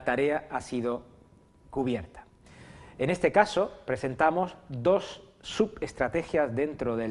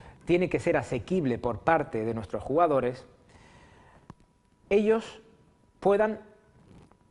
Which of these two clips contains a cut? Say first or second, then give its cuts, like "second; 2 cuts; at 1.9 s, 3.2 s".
second; 1 cut; at 2.3 s